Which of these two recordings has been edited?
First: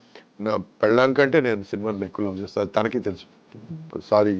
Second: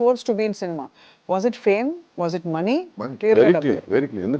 second; 1 cut; at 2.9 s

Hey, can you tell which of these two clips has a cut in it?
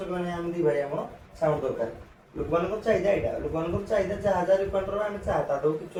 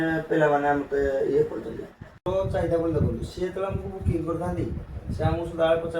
second; 1 cut; at 2.2 s

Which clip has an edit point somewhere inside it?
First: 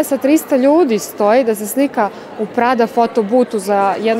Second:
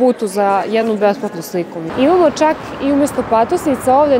second; 1 cut; at 1.8 s

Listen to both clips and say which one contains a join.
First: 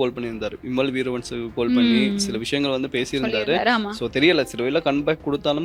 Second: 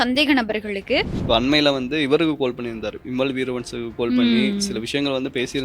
second; 1 cut; at 1.1 s

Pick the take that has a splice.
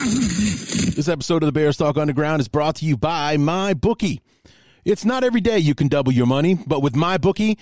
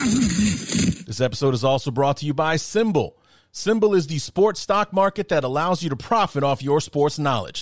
first; 1 cut; at 0.9 s

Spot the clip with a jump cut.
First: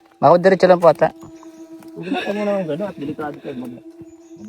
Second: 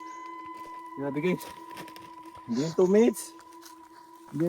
second; 1 cut; at 0.9 s

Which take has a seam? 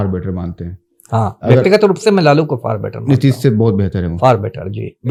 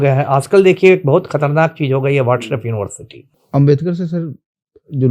second; 1 cut; at 3.0 s

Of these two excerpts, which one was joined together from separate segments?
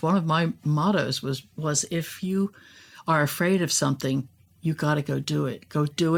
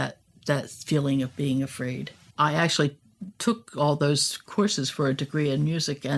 second; 1 cut; at 2.2 s

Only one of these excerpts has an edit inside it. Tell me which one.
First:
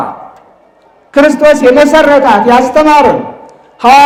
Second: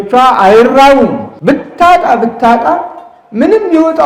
second; 1 cut; at 1.3 s

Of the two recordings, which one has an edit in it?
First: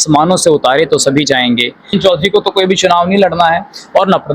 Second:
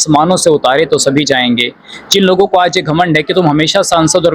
first; 1 cut; at 1.8 s

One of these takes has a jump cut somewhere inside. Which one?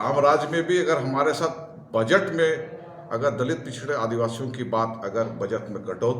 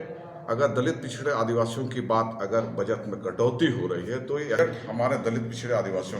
second; 1 cut; at 4.6 s

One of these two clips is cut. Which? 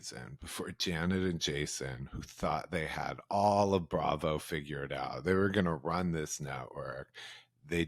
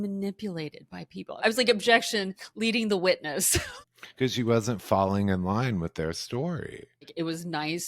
second; 3 cuts; at 1.4 s, 3.8 s, 7.1 s

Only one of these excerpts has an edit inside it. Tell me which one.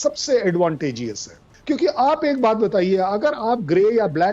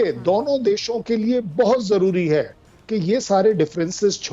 first; 1 cut; at 1.5 s

